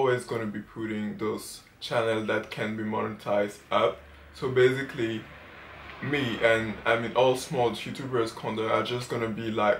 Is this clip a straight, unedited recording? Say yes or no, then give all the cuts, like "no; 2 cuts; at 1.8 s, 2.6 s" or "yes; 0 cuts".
yes; 0 cuts